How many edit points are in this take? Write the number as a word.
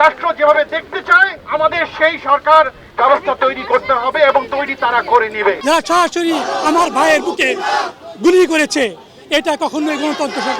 two